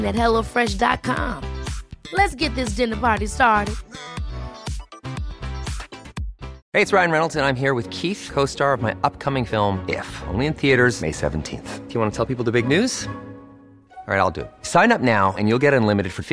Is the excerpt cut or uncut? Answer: cut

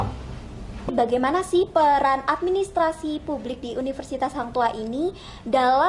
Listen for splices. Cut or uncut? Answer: cut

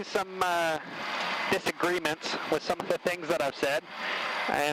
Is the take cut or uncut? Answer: uncut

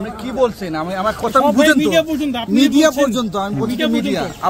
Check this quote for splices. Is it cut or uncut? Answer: uncut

